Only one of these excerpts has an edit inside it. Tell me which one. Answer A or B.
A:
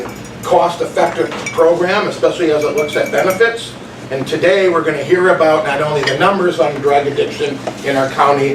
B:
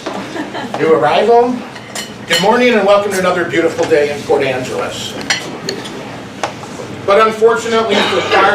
A